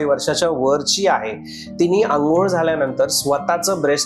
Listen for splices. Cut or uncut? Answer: uncut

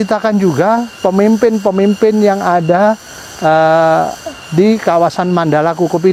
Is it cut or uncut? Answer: uncut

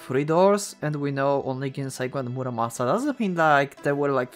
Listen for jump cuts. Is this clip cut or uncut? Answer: uncut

